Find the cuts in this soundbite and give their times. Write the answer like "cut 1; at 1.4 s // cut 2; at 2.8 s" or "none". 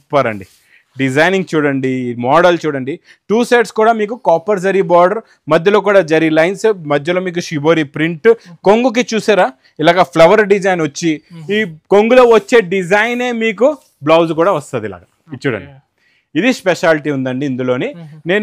none